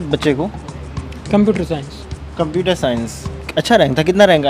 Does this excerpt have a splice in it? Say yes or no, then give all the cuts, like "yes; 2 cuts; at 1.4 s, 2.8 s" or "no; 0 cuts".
no; 0 cuts